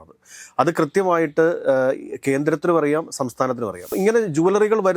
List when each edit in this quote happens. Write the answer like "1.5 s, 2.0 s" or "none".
3.9 s